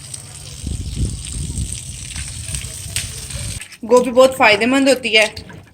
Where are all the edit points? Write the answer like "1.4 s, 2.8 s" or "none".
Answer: 3.5 s